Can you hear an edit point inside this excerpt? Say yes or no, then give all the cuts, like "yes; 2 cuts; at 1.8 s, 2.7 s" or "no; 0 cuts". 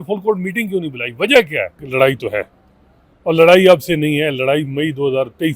yes; 1 cut; at 1.8 s